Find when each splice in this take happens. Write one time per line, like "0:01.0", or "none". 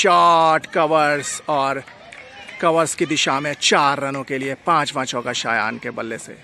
none